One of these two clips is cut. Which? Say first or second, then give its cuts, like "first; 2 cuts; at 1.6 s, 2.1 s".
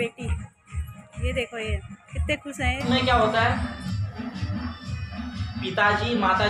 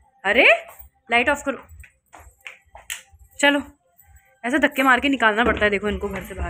first; 1 cut; at 2.8 s